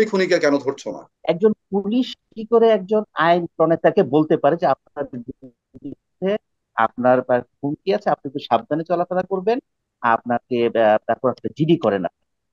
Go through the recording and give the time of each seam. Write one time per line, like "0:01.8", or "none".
0:01.1